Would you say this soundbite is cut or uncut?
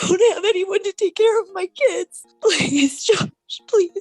cut